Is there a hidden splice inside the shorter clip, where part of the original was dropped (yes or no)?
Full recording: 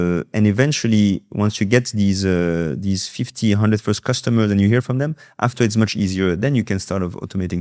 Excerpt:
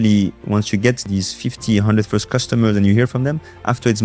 yes